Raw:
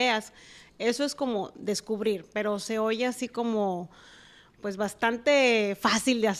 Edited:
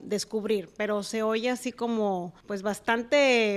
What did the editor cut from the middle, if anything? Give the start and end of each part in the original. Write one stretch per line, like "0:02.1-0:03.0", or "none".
0:04.0-0:04.5